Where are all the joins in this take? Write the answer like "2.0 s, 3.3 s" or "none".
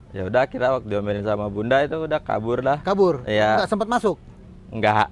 none